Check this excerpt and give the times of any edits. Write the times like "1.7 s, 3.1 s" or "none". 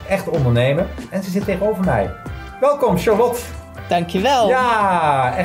none